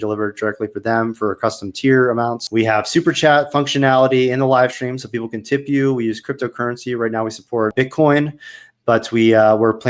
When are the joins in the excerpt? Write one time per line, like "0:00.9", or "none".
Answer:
0:02.4
0:07.7